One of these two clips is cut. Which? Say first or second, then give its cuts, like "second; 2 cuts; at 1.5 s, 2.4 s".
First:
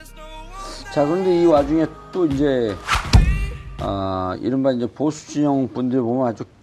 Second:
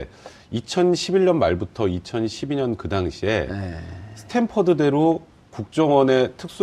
second; 1 cut; at 3.1 s